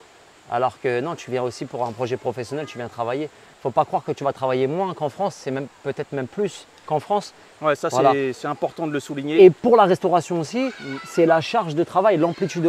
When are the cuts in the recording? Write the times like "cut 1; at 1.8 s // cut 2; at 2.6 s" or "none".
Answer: cut 1; at 3.5 s // cut 2; at 7.5 s